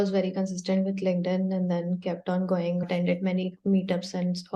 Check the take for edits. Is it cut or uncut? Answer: uncut